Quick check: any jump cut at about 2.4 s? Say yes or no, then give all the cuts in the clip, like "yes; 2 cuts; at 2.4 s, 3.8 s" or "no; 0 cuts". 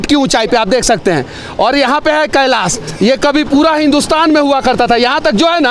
no; 0 cuts